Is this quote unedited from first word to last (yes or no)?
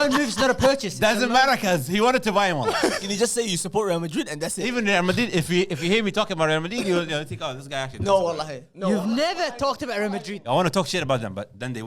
no